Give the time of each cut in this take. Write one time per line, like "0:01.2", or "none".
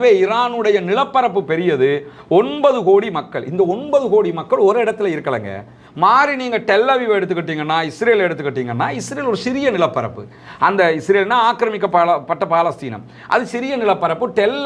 0:05.8